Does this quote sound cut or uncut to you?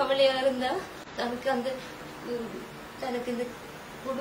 cut